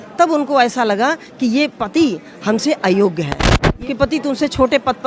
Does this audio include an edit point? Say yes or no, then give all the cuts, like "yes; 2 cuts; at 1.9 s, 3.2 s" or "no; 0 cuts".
yes; 1 cut; at 3.8 s